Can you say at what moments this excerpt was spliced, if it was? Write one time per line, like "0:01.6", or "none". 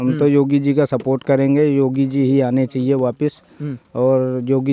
none